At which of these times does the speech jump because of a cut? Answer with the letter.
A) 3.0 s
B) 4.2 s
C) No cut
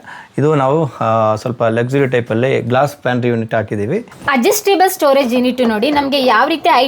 B